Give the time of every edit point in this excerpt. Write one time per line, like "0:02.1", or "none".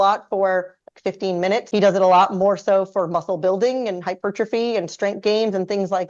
0:01.7